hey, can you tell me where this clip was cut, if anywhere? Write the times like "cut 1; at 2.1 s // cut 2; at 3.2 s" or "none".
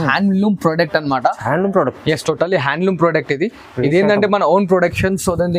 none